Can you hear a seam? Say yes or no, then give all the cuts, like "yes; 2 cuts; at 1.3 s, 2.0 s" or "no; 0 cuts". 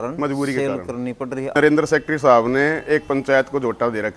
yes; 1 cut; at 1.6 s